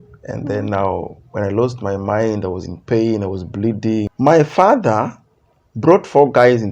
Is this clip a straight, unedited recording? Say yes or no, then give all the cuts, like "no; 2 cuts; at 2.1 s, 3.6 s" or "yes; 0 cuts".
no; 1 cut; at 4.1 s